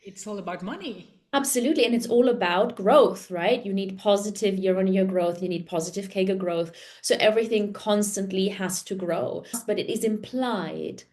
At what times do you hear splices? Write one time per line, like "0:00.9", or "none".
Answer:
0:09.6